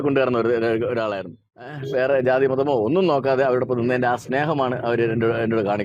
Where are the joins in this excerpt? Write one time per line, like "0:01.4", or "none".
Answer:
0:01.8